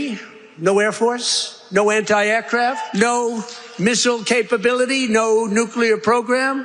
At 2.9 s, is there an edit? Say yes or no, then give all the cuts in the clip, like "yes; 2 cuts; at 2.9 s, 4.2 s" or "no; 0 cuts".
yes; 1 cut; at 2.9 s